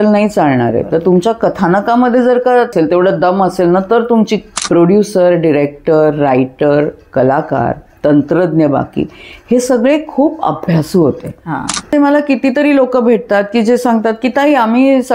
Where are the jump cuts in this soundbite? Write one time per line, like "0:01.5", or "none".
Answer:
0:02.7
0:04.5
0:11.9